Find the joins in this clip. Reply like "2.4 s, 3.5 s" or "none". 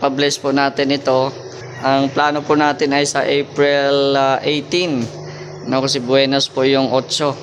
none